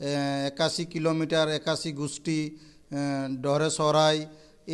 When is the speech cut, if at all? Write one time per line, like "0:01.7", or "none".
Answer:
none